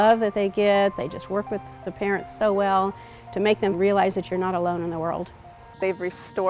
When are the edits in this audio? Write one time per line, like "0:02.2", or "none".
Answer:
0:01.0
0:03.8
0:05.6